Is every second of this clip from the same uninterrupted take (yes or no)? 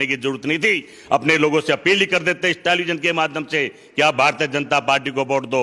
yes